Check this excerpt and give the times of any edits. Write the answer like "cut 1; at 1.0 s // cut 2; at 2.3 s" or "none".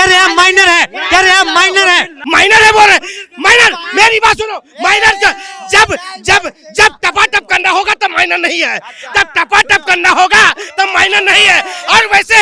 cut 1; at 2.2 s